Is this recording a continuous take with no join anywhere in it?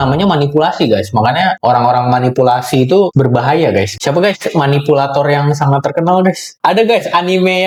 yes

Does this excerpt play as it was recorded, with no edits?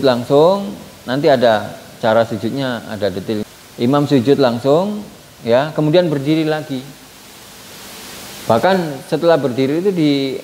no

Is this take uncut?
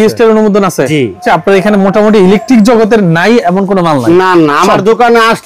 no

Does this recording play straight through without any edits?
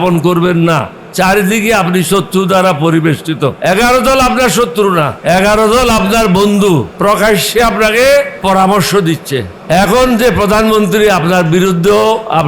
no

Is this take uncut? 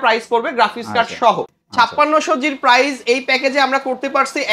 no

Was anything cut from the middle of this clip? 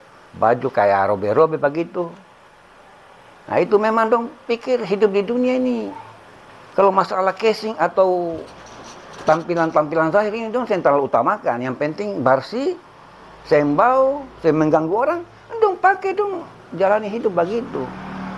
no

